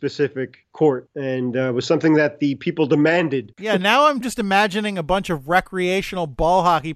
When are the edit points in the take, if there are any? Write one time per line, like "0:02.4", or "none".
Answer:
0:03.6

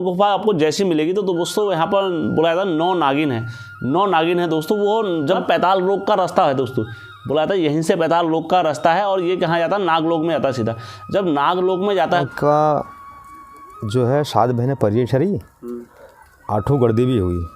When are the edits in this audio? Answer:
0:05.4
0:12.2

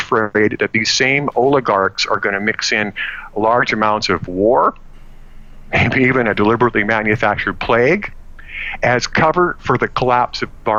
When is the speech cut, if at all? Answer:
none

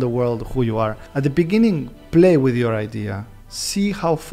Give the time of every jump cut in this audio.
0:01.0

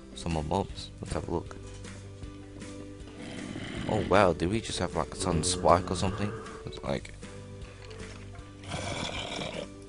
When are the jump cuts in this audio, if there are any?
0:05.5

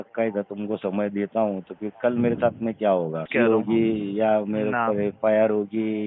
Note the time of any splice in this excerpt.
0:03.3

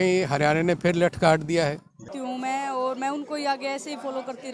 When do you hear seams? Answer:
0:02.1

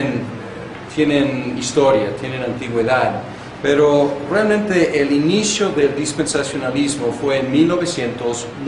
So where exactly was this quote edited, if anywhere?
0:06.9

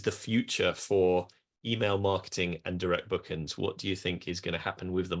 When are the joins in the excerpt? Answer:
none

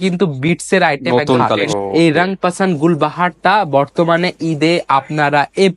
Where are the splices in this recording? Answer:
0:01.6

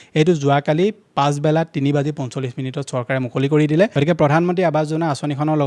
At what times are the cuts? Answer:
0:04.0

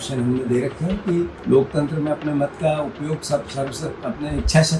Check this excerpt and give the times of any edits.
0:01.4

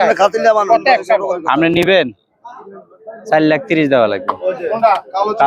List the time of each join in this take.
none

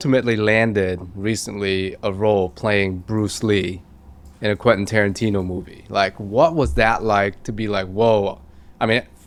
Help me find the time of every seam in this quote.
none

